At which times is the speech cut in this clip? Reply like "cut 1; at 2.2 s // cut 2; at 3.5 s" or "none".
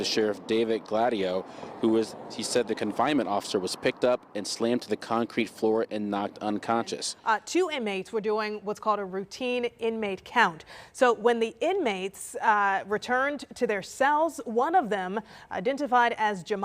cut 1; at 7.5 s